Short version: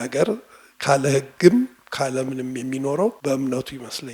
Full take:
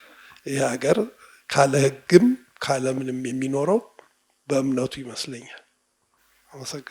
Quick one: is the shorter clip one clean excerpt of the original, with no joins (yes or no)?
no